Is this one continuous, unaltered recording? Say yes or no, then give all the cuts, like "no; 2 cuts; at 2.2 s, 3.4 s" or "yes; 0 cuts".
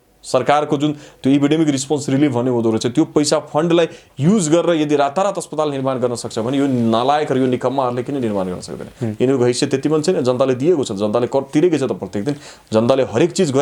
yes; 0 cuts